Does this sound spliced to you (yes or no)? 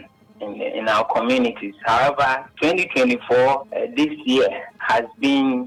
no